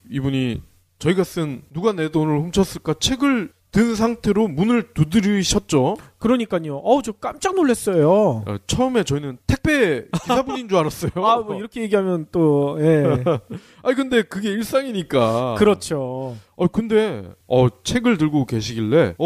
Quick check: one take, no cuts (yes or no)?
yes